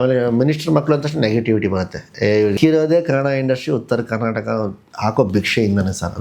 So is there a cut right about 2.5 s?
yes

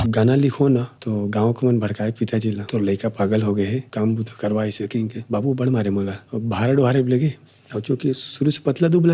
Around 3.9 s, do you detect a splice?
yes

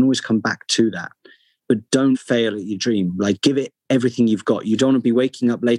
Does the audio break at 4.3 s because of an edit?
no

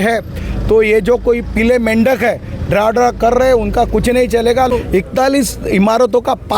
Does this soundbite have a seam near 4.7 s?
yes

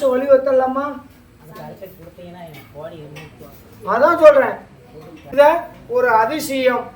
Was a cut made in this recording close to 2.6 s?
no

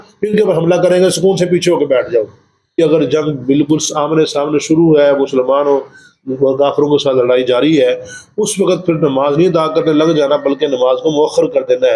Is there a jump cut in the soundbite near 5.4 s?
no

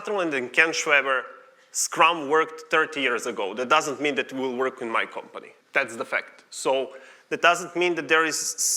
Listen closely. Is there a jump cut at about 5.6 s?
yes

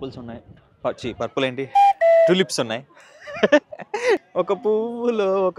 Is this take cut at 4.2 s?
yes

